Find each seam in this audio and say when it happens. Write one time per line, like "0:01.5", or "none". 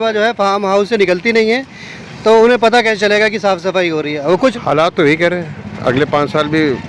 0:04.4